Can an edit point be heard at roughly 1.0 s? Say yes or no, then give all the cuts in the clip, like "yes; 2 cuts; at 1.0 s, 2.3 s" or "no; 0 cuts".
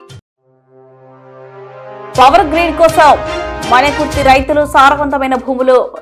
no; 1 cut; at 2.2 s